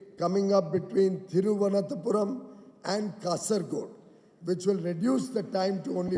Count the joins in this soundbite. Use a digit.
0